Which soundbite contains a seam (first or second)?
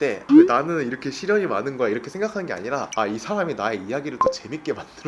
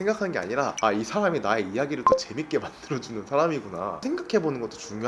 second